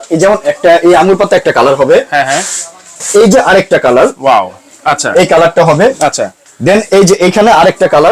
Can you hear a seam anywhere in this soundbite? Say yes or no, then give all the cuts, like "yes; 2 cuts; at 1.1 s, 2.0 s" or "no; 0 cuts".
no; 0 cuts